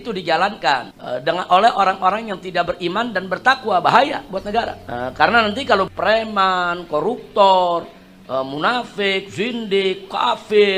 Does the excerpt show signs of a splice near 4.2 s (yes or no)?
no